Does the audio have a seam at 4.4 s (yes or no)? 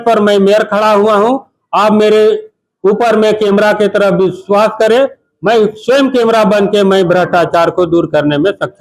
no